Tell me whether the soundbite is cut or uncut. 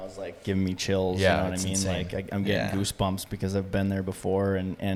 uncut